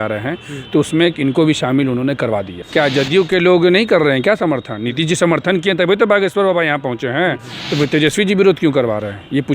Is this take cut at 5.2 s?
no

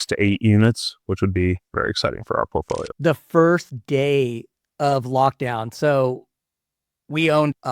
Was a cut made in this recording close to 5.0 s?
no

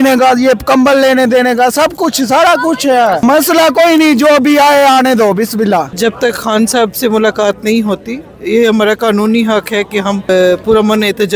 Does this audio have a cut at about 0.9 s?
no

